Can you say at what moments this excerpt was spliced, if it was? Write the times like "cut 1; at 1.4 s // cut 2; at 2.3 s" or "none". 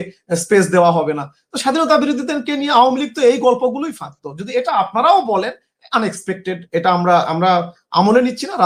none